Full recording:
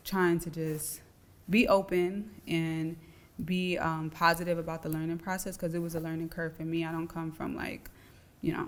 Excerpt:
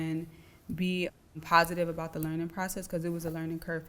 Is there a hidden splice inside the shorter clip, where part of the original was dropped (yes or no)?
no